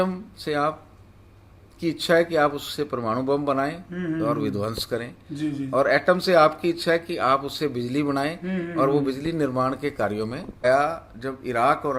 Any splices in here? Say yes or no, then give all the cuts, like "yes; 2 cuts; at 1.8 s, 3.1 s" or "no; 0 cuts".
yes; 1 cut; at 10.6 s